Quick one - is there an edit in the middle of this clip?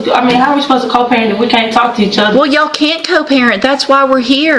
no; 0 cuts

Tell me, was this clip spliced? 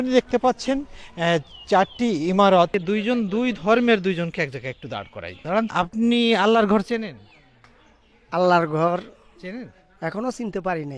yes; 2 cuts; at 2.8 s, 5.7 s

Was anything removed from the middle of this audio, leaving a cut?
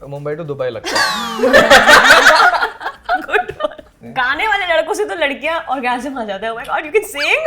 yes; 1 cut; at 3.9 s

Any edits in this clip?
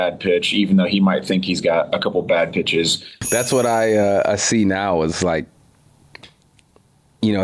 yes; 1 cut; at 3.2 s

